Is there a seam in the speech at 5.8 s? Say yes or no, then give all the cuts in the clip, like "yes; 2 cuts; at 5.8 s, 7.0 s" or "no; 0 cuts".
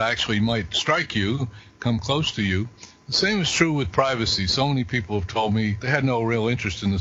yes; 1 cut; at 5.8 s